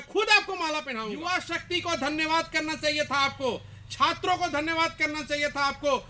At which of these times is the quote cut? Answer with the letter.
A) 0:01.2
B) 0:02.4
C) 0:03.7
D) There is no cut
A